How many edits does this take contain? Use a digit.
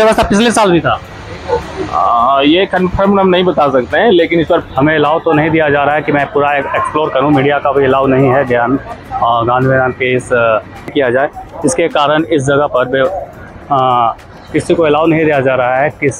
2